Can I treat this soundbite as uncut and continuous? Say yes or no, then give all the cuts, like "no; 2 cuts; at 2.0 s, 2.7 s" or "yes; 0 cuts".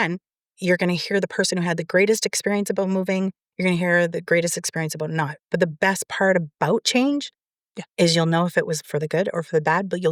yes; 0 cuts